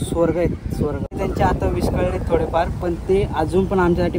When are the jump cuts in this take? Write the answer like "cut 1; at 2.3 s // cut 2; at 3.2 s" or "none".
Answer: cut 1; at 1.1 s